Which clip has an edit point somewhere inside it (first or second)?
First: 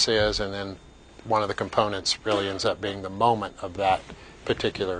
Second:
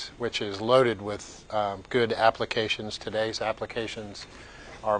first